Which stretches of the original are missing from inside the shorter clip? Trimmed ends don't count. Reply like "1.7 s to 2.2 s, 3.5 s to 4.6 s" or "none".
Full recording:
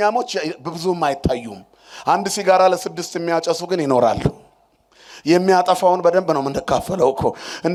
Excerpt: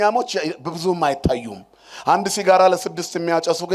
none